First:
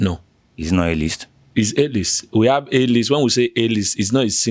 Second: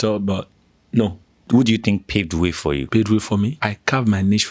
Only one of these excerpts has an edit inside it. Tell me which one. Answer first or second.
second